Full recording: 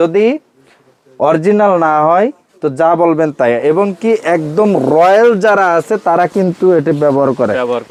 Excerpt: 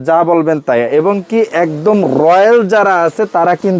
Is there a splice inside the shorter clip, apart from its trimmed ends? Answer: no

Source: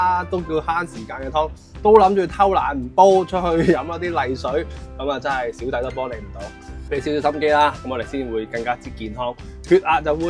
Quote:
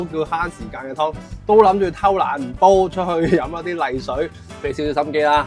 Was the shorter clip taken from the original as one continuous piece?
no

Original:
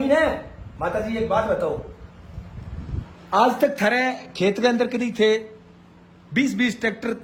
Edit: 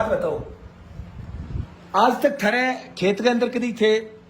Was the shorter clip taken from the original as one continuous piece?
yes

